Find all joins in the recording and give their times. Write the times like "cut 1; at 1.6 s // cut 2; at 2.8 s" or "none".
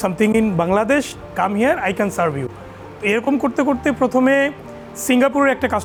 none